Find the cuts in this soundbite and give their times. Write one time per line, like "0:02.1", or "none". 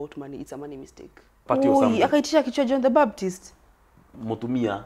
0:01.4